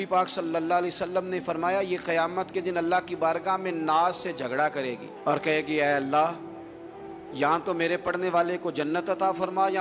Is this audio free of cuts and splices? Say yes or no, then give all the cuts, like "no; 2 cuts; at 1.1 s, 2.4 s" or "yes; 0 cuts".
yes; 0 cuts